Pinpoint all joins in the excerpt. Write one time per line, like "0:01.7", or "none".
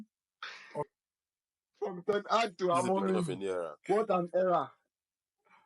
0:01.0